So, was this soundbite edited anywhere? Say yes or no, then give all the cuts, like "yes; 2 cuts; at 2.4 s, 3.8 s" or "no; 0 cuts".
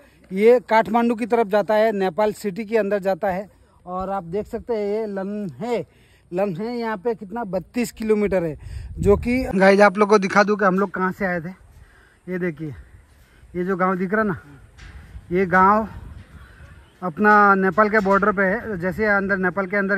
yes; 1 cut; at 9.5 s